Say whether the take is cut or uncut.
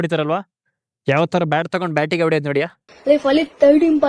cut